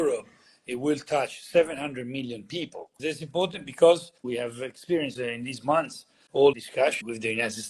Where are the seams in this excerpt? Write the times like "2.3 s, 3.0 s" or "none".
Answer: 2.8 s, 4.2 s, 5.1 s, 6.6 s